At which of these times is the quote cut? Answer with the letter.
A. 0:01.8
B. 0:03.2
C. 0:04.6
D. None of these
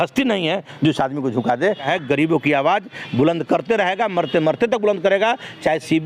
A